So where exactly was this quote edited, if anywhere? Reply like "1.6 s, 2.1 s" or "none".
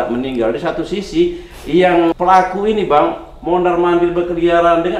2.2 s